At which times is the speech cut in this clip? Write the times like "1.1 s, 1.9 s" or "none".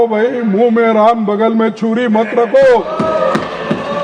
none